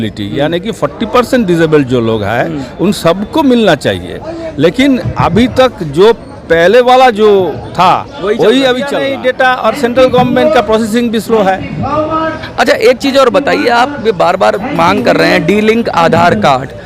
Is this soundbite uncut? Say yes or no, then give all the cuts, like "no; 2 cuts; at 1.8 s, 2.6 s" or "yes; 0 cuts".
no; 1 cut; at 9.1 s